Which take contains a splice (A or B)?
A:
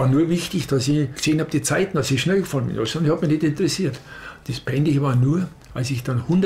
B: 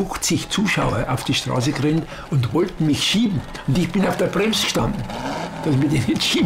A